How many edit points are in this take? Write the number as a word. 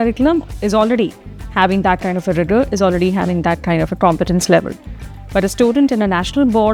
zero